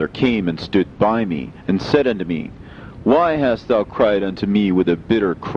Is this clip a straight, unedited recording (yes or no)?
yes